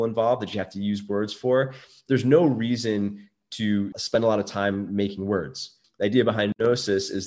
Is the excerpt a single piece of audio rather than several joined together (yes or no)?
no